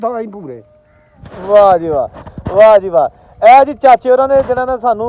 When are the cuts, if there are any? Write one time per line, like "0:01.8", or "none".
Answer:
none